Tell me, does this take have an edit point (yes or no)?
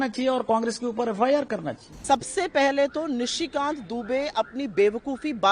yes